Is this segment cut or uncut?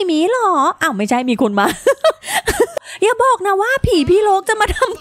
cut